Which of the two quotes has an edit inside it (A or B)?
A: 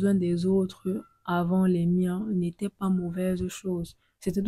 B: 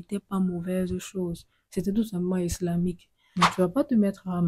B